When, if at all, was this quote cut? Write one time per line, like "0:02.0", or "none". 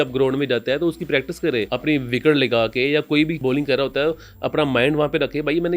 0:01.7
0:03.4